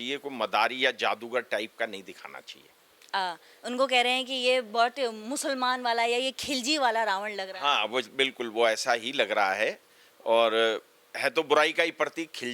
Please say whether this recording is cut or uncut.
uncut